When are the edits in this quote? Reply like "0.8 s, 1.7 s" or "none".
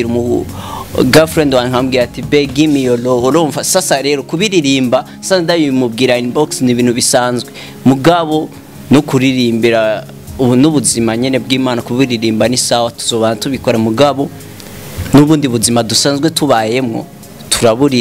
none